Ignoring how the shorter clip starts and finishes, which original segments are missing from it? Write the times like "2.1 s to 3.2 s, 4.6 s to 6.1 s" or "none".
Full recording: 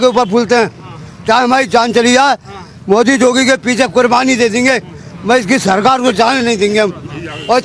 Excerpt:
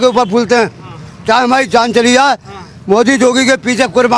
none